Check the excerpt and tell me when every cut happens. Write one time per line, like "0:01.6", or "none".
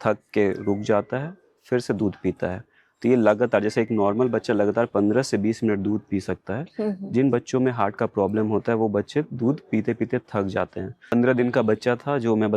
0:11.0